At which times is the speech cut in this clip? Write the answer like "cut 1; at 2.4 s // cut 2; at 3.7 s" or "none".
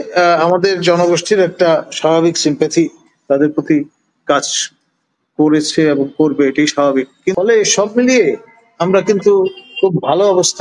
cut 1; at 7.3 s